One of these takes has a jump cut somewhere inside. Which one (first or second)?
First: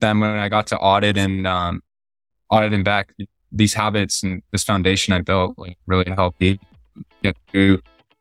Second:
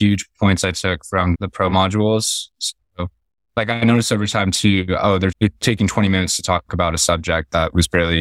second